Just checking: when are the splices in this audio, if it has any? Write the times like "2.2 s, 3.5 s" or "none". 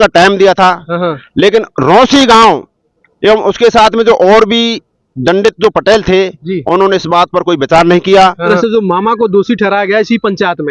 8.5 s